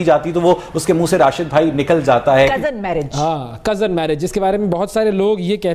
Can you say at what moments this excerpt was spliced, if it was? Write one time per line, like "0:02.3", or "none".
0:02.6